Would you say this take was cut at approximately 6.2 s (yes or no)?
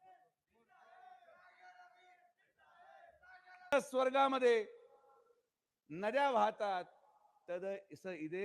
no